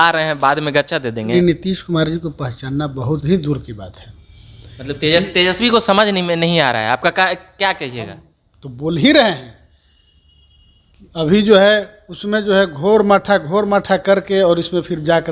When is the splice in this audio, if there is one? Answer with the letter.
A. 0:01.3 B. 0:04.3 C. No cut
A